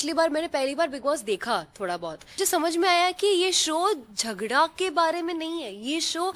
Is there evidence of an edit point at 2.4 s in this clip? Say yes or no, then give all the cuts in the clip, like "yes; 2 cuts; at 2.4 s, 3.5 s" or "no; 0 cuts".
yes; 1 cut; at 2.4 s